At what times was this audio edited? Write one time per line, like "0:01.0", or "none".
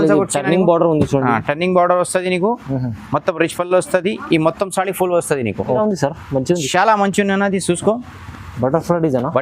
0:05.8